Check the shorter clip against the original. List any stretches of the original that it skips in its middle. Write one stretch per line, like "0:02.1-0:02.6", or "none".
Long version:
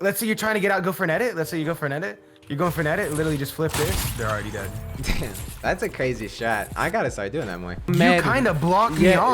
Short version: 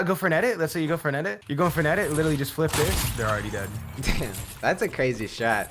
0:02.2-0:02.4